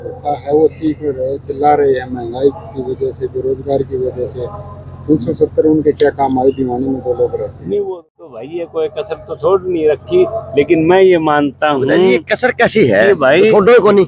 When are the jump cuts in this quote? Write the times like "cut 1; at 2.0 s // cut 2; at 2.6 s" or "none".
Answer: cut 1; at 7.9 s